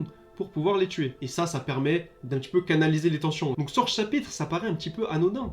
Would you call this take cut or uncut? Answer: cut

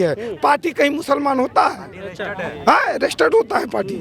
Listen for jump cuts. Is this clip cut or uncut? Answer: uncut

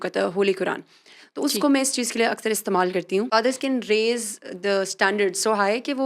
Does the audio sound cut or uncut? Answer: cut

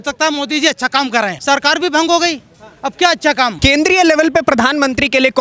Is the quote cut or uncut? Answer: cut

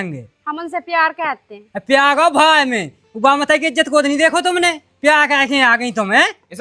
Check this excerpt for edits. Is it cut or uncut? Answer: uncut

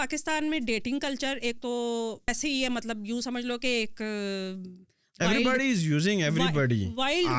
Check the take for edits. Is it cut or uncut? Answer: cut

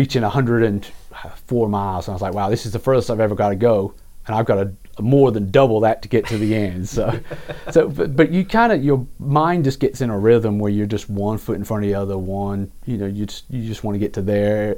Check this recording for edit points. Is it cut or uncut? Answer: uncut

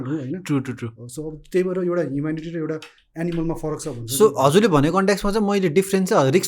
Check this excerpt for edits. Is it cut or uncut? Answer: uncut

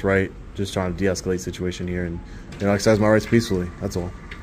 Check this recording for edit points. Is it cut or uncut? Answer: uncut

